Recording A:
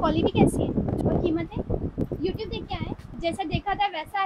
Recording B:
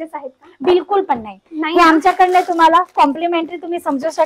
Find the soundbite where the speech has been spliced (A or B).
A